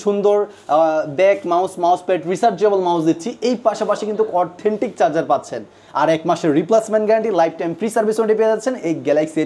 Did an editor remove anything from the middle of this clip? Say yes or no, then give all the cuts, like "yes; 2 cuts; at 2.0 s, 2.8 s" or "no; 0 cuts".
no; 0 cuts